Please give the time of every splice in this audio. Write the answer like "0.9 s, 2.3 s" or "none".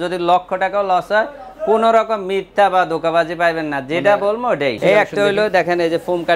4.8 s

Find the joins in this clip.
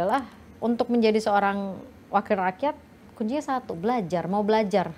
none

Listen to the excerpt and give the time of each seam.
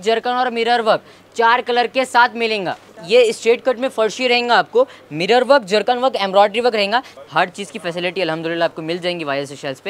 2.9 s, 7.2 s

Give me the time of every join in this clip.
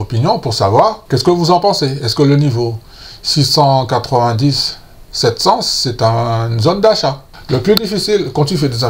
1.0 s, 7.3 s

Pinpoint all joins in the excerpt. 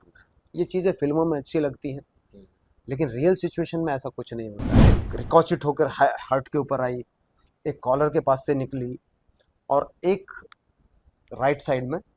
5.0 s

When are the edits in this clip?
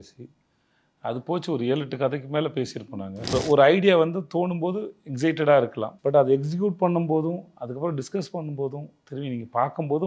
3.3 s, 5.9 s

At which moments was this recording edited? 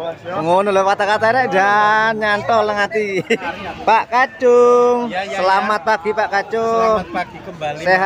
3.5 s

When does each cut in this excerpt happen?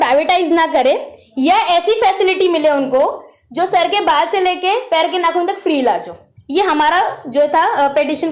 none

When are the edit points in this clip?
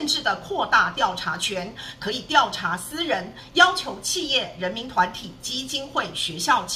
none

